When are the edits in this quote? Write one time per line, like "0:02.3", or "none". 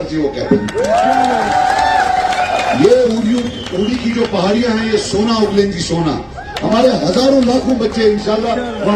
none

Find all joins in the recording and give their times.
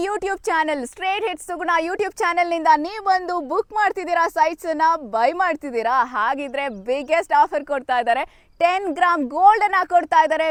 none

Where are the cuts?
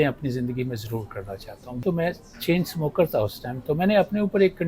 0:01.8

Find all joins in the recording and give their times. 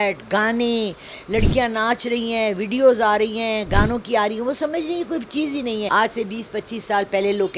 0:05.9

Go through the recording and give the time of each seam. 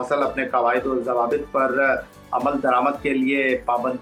none

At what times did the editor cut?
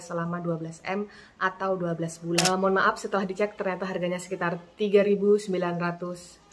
0:02.4

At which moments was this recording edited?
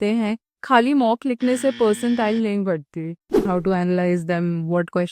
0:03.4

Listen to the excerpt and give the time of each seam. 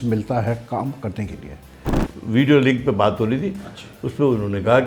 0:02.0

